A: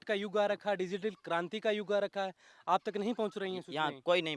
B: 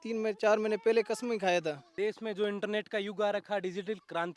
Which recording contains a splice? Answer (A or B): B